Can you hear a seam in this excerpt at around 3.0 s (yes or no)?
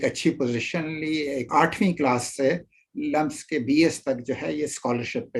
no